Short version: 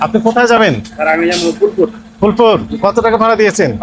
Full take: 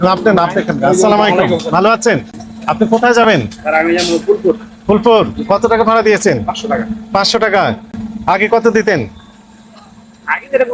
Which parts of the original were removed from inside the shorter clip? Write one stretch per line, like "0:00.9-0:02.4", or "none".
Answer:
none